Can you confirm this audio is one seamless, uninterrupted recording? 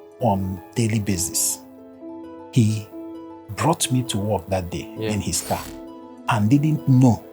yes; 0 cuts

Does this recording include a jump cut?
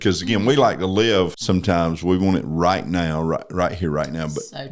yes; 1 cut; at 1.4 s

